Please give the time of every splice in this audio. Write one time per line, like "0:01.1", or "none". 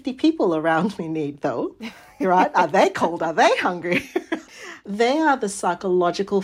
0:04.5